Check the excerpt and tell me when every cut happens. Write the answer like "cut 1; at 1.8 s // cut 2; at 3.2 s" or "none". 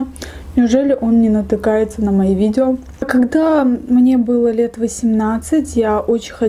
cut 1; at 2.9 s